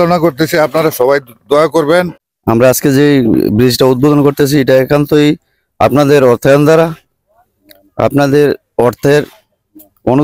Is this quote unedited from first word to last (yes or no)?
no